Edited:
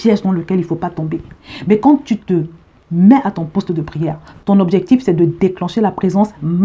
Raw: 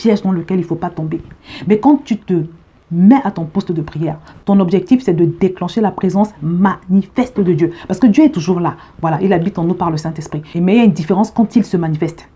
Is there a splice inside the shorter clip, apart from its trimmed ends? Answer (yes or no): no